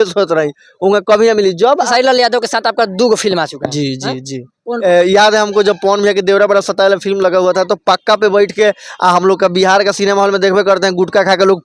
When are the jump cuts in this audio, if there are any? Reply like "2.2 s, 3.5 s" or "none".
1.8 s, 4.7 s